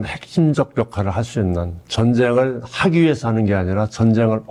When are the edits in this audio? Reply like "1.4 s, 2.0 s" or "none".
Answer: none